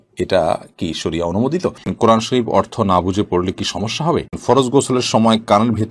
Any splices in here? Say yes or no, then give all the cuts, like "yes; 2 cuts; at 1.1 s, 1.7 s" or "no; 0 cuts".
yes; 2 cuts; at 1.9 s, 4.4 s